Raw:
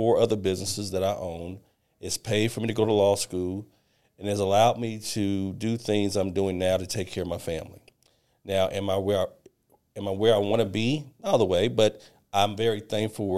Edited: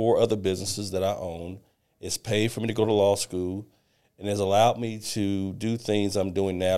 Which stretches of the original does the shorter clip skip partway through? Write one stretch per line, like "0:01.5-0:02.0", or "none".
none